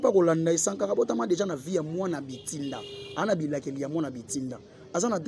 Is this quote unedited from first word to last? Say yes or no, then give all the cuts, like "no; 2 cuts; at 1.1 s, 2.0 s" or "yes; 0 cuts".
yes; 0 cuts